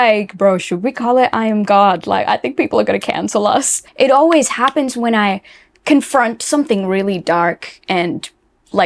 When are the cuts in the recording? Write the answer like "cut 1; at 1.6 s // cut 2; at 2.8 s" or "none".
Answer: cut 1; at 3.8 s